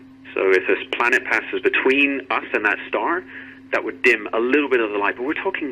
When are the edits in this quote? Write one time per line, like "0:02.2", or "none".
none